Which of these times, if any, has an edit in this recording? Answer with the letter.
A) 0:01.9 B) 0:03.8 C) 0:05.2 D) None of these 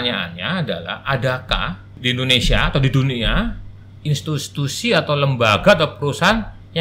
A